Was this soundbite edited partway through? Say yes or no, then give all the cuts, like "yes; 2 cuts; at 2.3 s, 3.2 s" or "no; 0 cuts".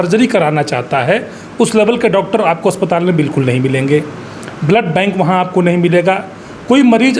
no; 0 cuts